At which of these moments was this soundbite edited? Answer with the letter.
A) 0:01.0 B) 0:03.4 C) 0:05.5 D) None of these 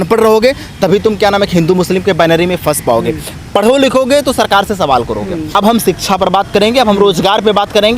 C